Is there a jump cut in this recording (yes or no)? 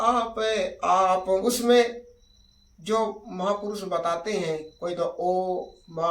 yes